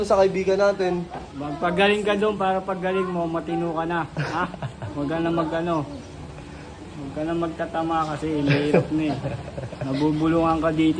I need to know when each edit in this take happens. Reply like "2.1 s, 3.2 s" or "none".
none